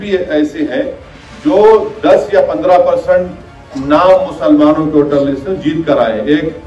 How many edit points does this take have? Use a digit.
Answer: 0